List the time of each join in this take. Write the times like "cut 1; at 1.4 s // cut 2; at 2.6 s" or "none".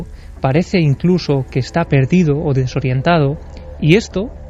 none